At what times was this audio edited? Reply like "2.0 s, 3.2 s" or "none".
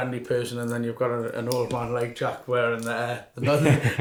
none